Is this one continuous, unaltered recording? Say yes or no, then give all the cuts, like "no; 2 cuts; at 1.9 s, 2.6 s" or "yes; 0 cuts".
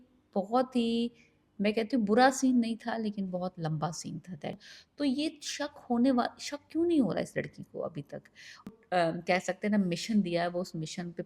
no; 2 cuts; at 4.7 s, 8.7 s